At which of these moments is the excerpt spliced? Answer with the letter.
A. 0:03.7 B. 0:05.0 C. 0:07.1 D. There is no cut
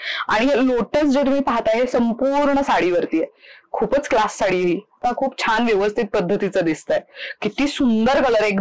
B